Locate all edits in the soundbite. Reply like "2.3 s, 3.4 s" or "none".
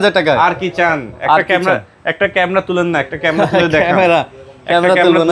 none